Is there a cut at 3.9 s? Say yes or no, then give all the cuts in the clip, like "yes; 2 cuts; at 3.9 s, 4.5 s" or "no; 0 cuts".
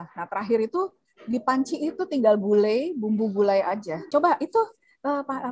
yes; 2 cuts; at 1.0 s, 3.9 s